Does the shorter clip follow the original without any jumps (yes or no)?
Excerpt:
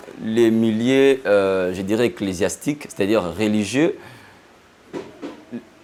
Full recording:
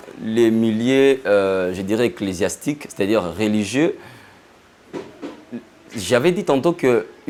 yes